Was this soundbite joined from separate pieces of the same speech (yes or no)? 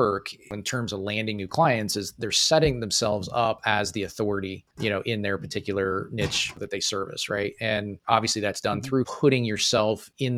yes